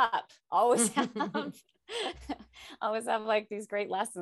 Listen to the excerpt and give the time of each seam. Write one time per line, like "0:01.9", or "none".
none